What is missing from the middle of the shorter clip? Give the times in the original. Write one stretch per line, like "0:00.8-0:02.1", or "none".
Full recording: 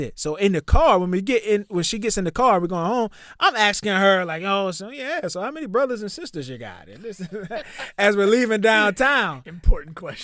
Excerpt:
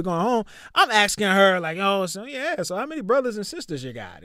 none